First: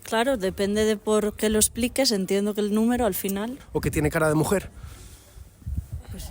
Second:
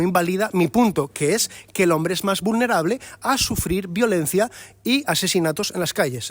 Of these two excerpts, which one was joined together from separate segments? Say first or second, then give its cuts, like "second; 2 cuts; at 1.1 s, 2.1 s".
first; 1 cut; at 3.6 s